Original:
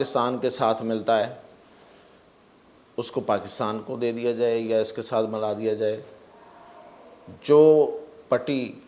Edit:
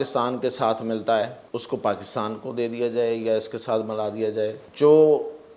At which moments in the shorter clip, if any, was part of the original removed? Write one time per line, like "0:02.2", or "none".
0:01.4
0:04.6